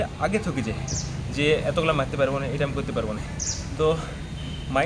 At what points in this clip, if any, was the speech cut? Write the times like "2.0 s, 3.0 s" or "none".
none